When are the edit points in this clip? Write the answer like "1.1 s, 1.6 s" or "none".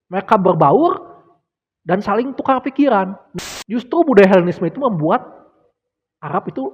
3.2 s